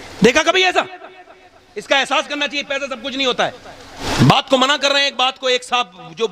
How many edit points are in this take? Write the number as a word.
one